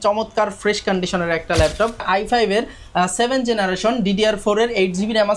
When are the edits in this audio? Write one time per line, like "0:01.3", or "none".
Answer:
0:02.1